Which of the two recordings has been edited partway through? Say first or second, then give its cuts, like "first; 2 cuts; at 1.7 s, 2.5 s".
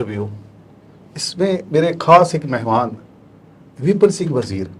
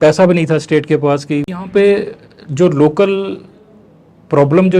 second; 1 cut; at 1.6 s